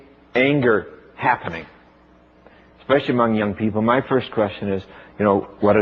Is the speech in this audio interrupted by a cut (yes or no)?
yes